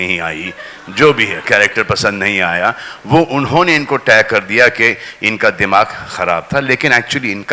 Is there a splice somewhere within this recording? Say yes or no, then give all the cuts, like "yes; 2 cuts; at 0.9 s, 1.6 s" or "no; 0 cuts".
no; 0 cuts